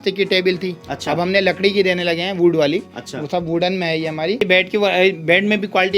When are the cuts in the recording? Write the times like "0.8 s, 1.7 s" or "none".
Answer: none